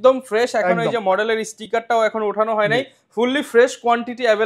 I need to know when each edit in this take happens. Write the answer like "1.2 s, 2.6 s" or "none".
none